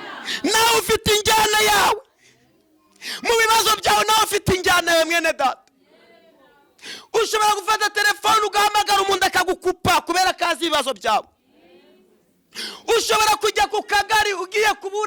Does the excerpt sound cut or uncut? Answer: uncut